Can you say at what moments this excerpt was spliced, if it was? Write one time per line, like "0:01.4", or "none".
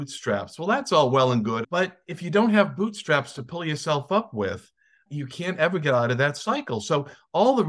0:01.6